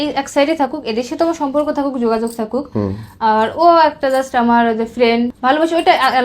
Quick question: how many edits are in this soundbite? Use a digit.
1